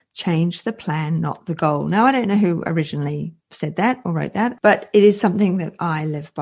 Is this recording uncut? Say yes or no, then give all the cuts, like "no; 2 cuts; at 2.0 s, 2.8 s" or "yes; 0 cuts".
no; 1 cut; at 4.6 s